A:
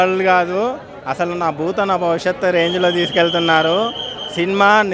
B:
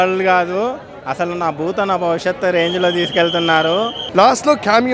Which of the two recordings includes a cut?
B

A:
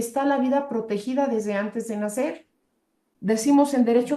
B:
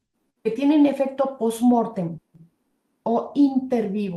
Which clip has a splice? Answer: A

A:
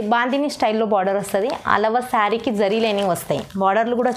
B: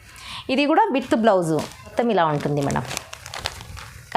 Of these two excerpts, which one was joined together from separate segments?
B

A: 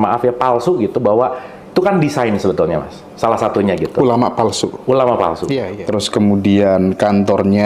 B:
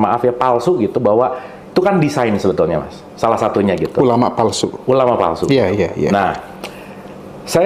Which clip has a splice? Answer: A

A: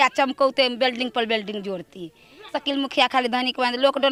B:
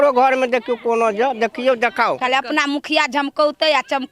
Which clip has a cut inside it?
B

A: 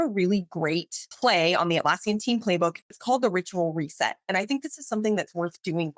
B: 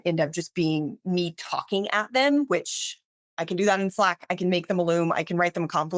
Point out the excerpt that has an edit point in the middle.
A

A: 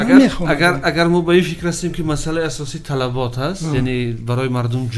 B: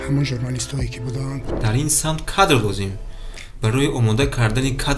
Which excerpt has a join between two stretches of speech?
B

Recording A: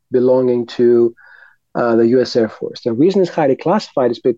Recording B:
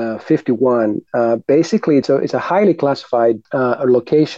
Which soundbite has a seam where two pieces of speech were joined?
B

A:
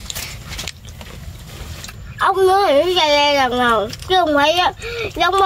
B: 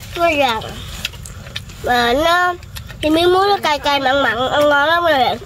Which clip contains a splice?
A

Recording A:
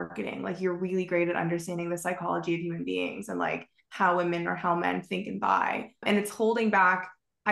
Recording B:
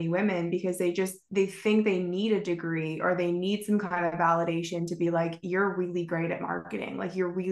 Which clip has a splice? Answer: A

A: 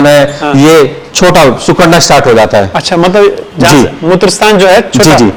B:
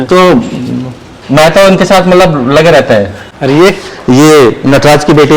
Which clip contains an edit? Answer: B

